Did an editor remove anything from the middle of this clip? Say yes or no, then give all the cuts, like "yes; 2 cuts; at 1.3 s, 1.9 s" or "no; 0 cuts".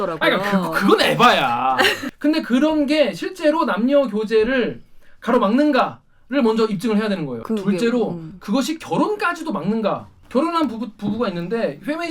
yes; 3 cuts; at 2.0 s, 7.4 s, 10.2 s